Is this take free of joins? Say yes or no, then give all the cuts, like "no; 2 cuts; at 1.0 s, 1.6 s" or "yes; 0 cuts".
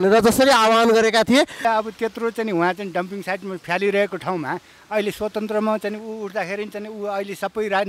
no; 1 cut; at 1.6 s